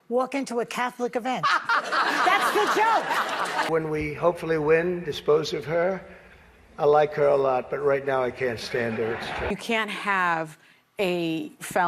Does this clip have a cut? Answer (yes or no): yes